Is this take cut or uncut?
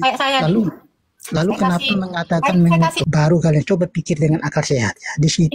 cut